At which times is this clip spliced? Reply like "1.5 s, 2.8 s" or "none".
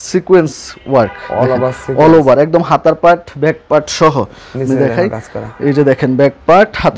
none